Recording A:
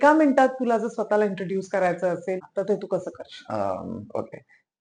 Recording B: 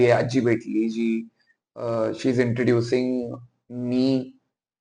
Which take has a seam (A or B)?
A